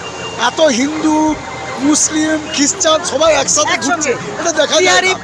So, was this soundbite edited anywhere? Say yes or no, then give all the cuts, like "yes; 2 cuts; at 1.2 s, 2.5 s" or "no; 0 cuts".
no; 0 cuts